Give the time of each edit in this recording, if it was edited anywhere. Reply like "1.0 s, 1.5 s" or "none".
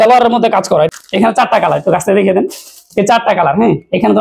0.9 s